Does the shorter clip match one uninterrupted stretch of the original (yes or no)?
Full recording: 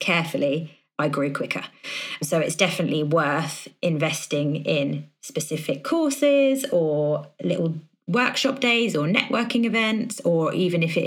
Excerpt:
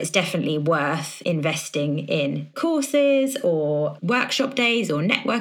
no